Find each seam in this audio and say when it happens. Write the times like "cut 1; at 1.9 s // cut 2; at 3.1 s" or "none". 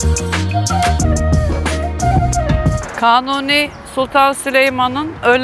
cut 1; at 2.8 s